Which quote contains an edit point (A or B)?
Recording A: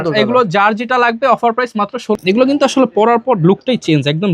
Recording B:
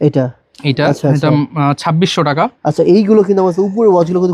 A